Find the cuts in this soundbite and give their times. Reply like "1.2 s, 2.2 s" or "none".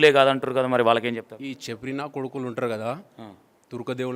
none